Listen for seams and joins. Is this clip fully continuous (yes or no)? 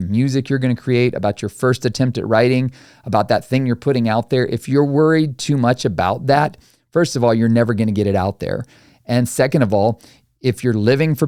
yes